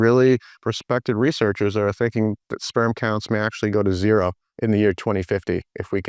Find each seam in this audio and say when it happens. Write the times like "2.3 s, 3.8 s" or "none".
4.5 s

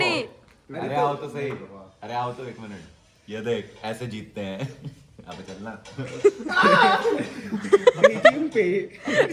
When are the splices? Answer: none

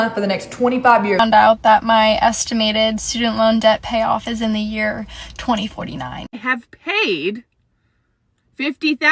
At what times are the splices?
1.2 s, 6.1 s

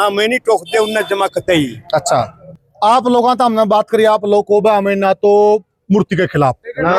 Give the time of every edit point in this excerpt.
2.4 s

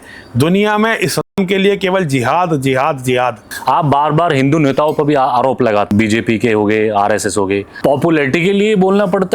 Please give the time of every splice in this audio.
3.5 s, 5.9 s, 7.7 s

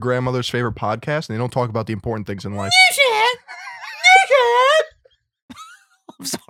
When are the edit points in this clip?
none

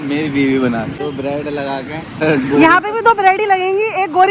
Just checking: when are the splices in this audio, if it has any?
1.1 s, 2.2 s

